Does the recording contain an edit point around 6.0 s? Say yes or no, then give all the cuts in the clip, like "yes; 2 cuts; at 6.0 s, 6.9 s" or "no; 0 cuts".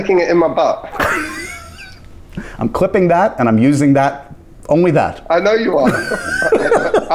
no; 0 cuts